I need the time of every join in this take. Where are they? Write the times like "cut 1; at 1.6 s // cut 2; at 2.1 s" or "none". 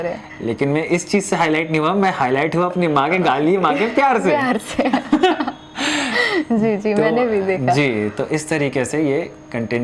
none